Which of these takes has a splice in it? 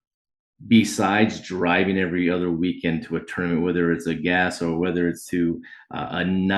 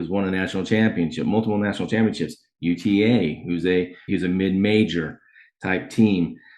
second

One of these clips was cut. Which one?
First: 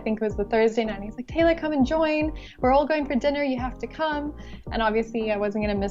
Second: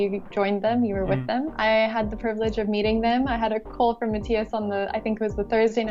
second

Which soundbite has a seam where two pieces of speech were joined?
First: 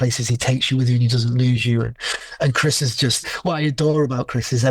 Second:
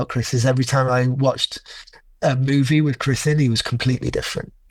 first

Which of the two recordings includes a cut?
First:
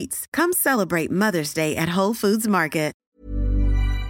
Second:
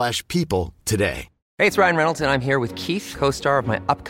first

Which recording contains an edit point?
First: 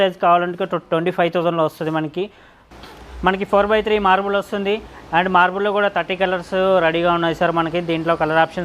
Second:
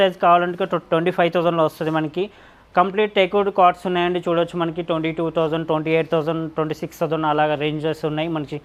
first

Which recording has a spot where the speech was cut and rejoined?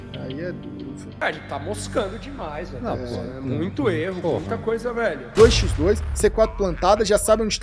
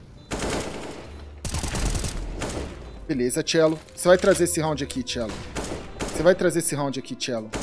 first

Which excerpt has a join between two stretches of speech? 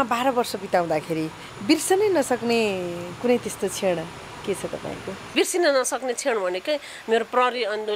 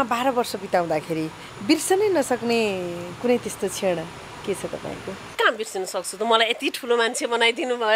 first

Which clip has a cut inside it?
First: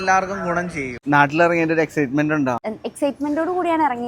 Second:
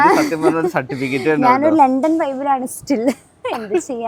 first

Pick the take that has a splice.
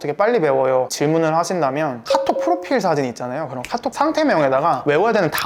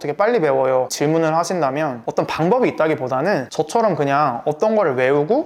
first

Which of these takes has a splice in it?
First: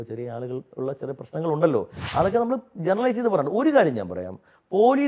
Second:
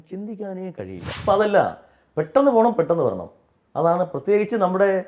second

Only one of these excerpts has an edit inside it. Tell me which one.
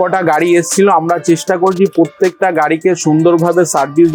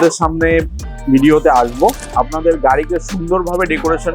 second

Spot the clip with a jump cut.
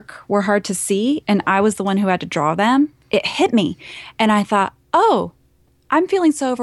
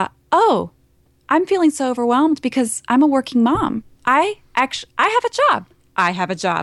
first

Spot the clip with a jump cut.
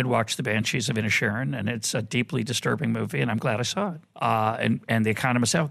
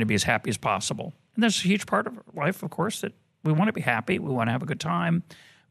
first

